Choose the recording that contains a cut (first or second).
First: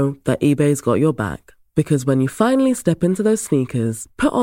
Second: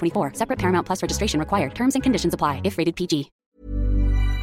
second